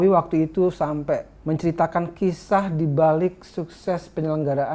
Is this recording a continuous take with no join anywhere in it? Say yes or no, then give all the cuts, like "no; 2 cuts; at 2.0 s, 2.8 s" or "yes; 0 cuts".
no; 1 cut; at 1.3 s